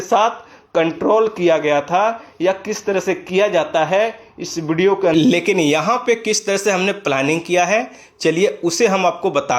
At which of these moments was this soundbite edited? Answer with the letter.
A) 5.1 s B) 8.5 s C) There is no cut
A